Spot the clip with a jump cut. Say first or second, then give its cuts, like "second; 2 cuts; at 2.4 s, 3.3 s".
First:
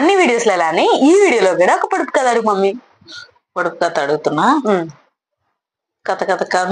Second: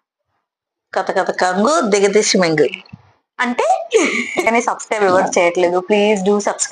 second; 1 cut; at 4.4 s